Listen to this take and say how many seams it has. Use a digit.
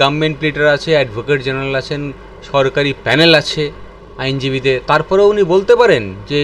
1